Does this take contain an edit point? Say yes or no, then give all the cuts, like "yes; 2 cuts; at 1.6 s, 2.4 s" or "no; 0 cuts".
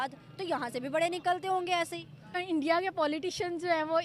yes; 1 cut; at 2.4 s